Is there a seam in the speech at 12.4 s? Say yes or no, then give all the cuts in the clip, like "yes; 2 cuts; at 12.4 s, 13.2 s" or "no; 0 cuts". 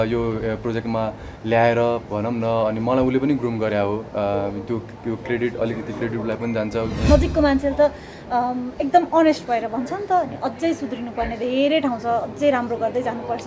no; 1 cut; at 7.1 s